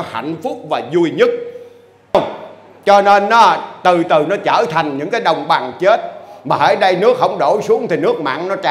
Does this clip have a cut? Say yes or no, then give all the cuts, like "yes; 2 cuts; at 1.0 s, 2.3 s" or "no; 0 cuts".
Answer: yes; 1 cut; at 2.1 s